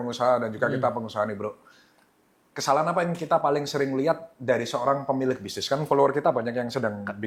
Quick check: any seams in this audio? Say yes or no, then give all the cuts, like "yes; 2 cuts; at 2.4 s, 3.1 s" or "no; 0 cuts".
no; 0 cuts